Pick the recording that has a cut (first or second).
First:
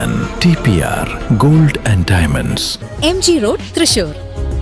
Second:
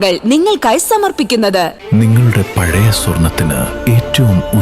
first